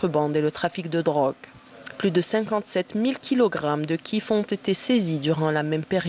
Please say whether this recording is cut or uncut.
cut